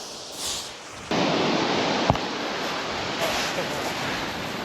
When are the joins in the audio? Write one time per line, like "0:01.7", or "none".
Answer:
0:01.1